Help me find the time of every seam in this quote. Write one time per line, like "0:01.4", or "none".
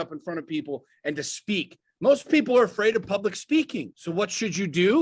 0:03.9